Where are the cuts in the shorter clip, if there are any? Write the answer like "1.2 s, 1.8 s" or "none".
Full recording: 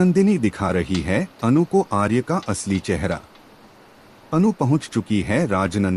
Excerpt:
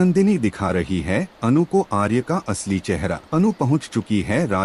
3.2 s